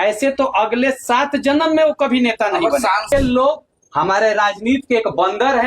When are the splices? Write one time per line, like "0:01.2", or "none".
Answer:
0:03.1